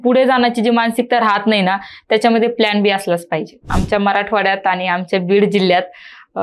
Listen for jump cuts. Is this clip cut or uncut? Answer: cut